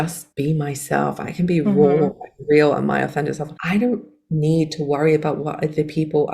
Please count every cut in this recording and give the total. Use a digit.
1